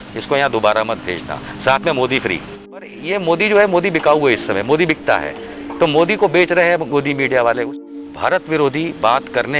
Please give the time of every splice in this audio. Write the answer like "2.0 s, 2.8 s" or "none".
2.9 s, 7.7 s